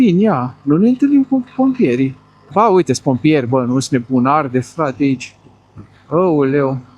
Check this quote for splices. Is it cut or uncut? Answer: cut